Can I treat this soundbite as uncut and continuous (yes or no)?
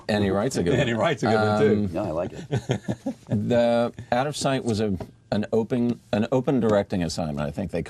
yes